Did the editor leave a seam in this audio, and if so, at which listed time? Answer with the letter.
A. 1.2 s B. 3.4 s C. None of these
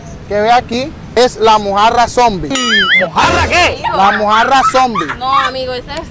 A